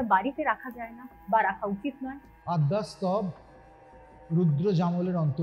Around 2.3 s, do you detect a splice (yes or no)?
yes